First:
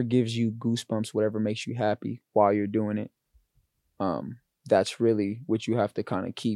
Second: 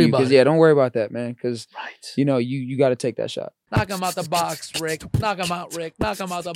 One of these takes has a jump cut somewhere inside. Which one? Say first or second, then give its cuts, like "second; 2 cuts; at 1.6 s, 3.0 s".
second; 1 cut; at 3.6 s